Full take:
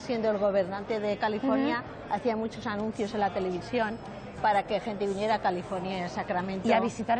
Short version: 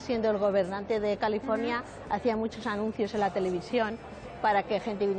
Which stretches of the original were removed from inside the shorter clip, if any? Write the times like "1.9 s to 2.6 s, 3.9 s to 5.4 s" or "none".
none